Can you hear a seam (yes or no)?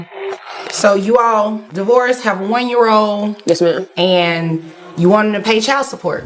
no